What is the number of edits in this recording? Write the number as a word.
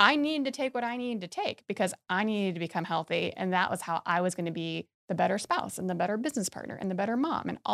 zero